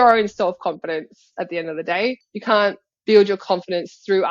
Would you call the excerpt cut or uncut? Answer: cut